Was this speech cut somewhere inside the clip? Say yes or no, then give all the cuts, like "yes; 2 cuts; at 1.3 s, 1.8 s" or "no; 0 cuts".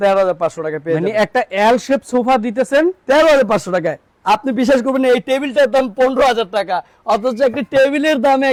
no; 0 cuts